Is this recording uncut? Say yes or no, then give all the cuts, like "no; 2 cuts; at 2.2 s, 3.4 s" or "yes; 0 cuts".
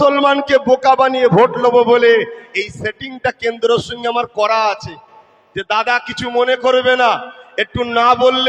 yes; 0 cuts